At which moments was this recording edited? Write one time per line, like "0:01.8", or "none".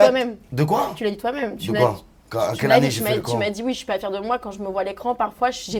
none